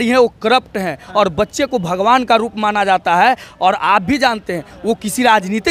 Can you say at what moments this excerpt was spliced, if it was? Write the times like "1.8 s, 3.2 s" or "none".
none